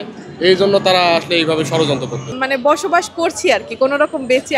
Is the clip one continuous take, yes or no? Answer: no